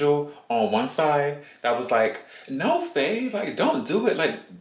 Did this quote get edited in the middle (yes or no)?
no